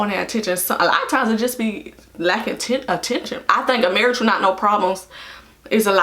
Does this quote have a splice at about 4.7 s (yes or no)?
no